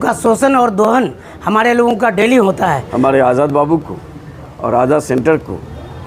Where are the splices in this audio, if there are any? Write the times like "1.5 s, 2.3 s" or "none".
2.8 s